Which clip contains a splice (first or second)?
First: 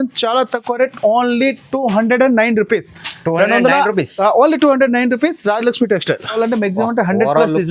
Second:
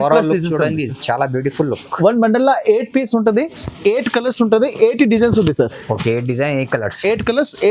first